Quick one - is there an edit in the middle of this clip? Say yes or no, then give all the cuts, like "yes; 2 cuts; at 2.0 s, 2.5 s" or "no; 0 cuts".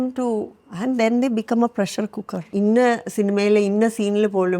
yes; 1 cut; at 2.4 s